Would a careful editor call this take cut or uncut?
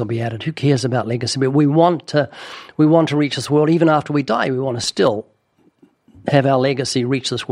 uncut